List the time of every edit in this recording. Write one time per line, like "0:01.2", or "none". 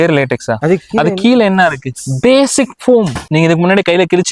none